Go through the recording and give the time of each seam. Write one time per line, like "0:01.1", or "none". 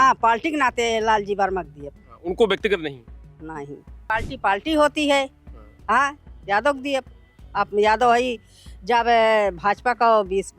0:04.0